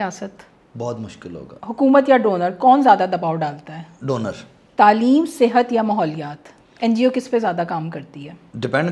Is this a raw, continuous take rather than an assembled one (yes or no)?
no